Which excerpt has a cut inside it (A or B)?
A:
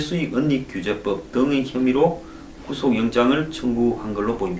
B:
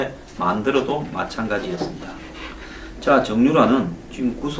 B